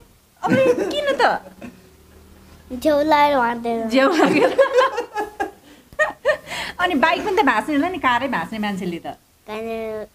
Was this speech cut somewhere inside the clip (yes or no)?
no